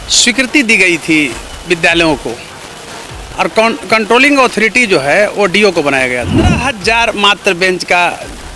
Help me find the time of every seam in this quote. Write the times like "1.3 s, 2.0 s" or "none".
6.7 s